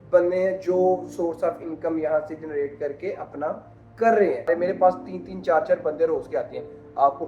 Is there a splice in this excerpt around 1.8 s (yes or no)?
no